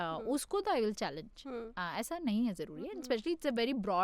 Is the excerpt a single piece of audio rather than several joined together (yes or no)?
yes